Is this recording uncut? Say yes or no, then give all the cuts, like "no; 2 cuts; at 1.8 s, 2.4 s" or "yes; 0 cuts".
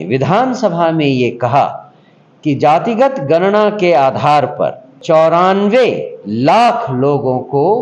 no; 1 cut; at 4.9 s